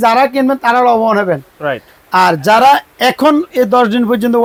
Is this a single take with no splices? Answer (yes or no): yes